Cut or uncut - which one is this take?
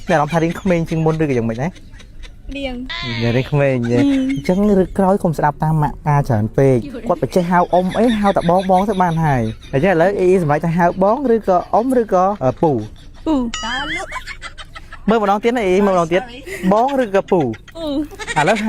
cut